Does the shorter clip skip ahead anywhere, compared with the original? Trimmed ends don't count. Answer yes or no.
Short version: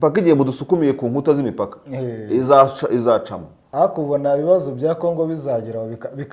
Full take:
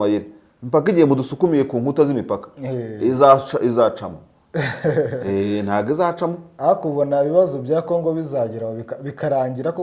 yes